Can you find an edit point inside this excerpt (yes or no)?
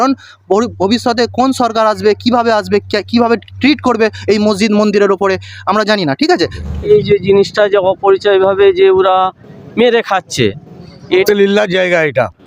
yes